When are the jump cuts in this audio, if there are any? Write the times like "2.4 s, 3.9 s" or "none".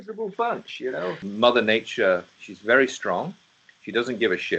1.3 s